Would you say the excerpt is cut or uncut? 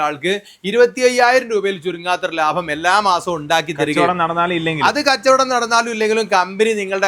uncut